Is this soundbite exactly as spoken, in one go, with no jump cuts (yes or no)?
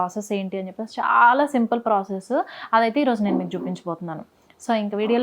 yes